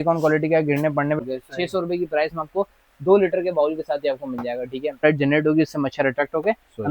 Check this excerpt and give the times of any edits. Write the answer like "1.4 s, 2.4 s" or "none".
1.2 s, 5.0 s